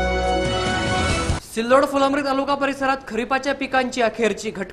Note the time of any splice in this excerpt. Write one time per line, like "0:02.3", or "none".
0:01.3